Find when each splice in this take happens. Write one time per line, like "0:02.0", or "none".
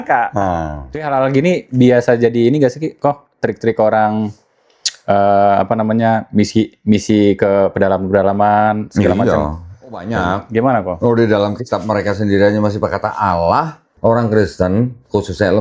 0:01.1
0:10.1
0:13.8